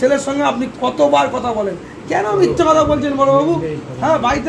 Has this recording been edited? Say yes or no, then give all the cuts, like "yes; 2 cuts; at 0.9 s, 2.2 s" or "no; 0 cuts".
no; 0 cuts